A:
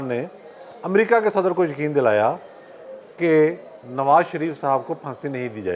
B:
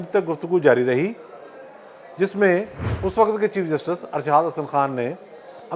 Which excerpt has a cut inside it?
B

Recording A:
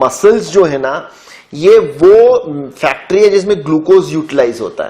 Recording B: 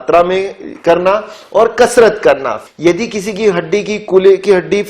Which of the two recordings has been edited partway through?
B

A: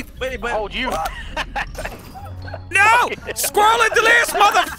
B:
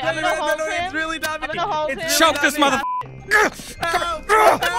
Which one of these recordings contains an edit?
B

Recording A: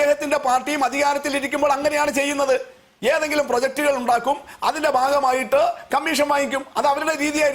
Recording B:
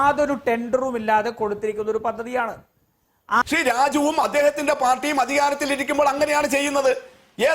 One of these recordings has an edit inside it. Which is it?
B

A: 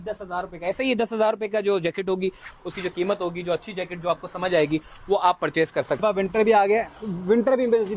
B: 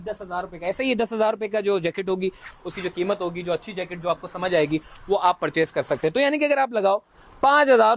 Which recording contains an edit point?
A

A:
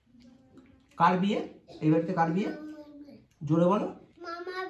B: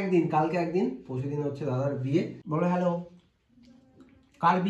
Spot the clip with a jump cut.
B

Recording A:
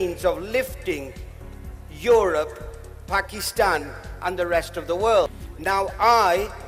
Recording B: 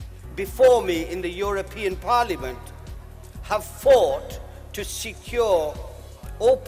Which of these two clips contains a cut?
A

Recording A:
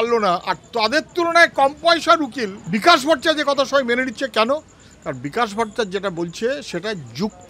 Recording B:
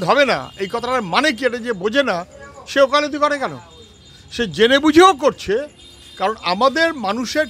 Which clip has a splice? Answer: A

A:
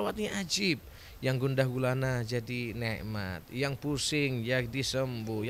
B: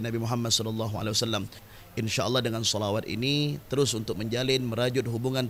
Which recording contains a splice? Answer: B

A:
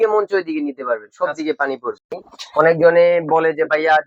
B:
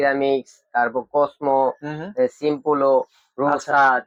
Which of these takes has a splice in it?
A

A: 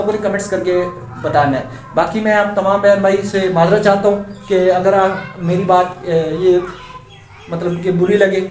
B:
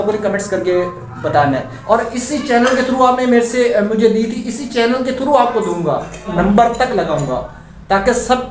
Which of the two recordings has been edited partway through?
B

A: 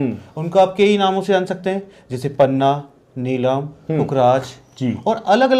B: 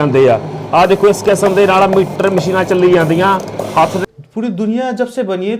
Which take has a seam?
B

